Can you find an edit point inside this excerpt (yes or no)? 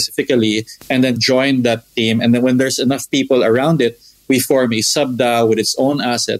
yes